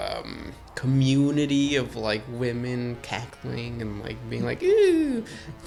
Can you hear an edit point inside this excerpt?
no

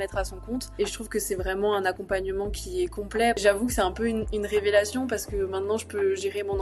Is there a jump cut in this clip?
yes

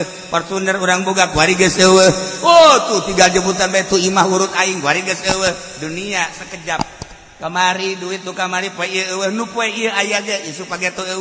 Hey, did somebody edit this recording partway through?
no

